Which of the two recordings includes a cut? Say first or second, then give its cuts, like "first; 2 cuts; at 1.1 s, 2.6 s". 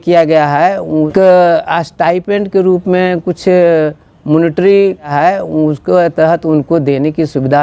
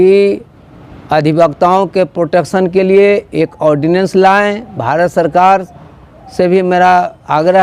first; 2 cuts; at 1.1 s, 5.1 s